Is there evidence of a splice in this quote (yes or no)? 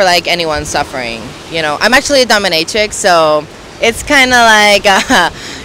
no